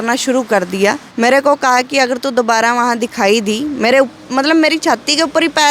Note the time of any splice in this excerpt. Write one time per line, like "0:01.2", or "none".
0:01.1

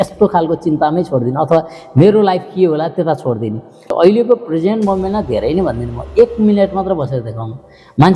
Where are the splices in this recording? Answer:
0:03.8

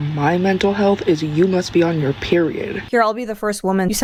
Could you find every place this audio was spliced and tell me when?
none

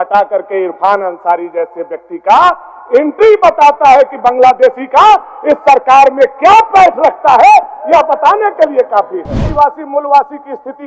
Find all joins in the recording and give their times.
0:09.5

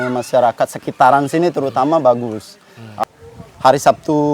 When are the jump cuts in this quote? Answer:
0:03.0

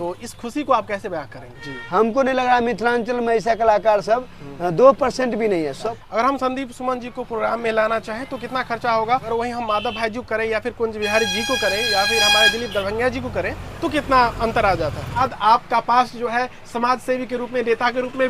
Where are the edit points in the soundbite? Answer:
0:01.4
0:05.8
0:09.3
0:15.2

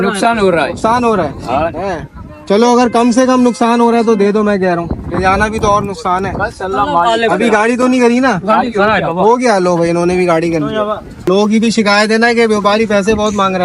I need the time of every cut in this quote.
0:11.3

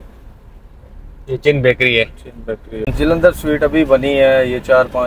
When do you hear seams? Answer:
0:02.9

